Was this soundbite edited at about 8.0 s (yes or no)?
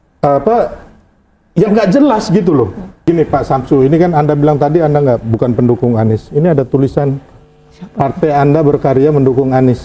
no